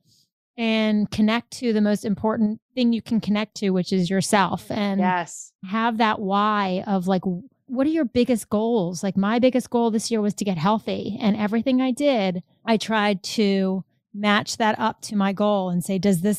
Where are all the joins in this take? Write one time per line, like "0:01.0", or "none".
0:12.5